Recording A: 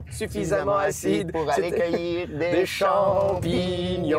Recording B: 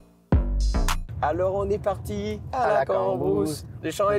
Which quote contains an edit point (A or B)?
B